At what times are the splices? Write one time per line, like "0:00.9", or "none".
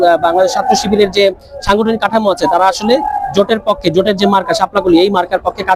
none